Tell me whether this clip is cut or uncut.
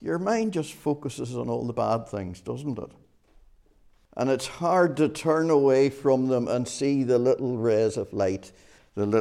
uncut